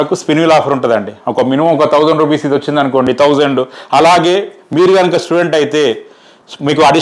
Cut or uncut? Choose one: uncut